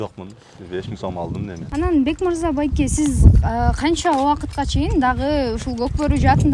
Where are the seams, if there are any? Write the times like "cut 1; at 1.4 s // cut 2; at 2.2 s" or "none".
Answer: cut 1; at 1.7 s